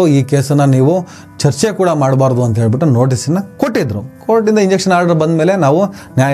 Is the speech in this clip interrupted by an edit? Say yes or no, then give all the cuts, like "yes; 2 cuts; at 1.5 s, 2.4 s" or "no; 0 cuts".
no; 0 cuts